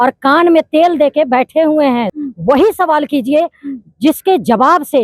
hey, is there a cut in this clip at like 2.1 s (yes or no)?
yes